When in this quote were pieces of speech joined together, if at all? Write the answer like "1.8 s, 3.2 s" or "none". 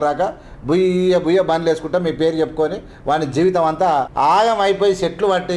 4.1 s